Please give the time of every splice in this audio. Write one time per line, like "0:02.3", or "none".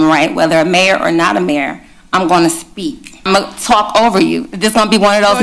0:03.2